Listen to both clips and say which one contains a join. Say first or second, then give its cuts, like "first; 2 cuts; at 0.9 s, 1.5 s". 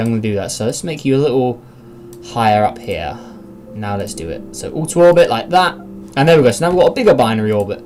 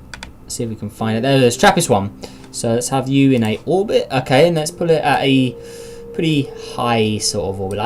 second; 1 cut; at 6.0 s